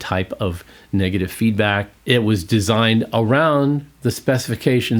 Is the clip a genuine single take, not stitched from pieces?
no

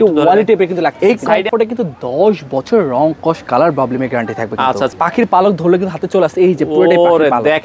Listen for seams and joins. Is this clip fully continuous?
no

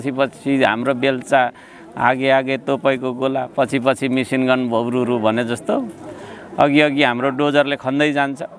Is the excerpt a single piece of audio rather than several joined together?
yes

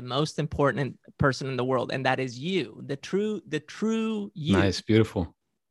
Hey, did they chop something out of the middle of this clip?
no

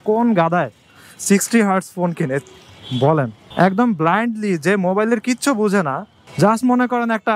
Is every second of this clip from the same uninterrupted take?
no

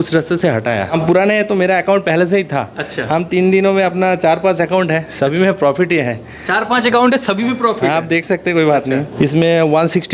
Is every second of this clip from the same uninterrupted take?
no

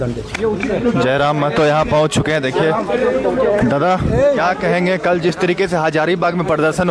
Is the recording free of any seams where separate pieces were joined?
yes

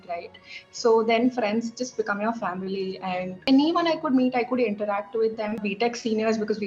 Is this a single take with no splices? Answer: no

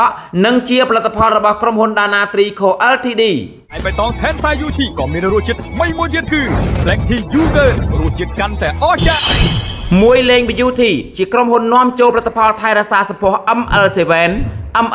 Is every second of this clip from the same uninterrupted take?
no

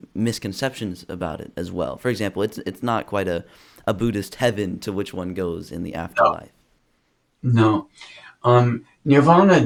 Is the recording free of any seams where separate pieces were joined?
yes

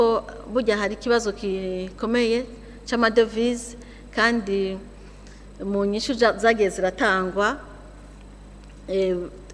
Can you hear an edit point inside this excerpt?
no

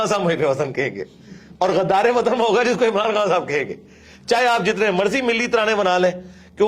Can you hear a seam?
no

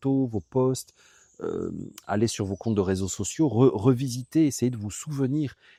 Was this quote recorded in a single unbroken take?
yes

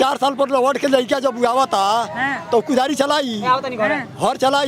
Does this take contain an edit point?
no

